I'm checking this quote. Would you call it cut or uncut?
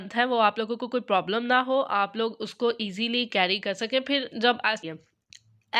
cut